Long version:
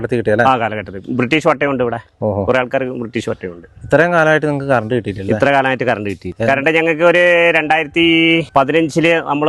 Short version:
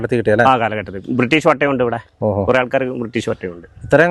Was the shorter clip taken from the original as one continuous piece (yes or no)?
yes